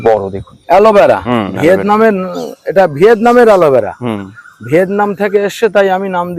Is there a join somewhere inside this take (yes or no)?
no